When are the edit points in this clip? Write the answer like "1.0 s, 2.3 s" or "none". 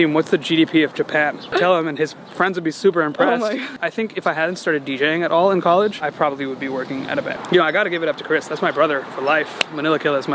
1.5 s, 3.7 s, 7.3 s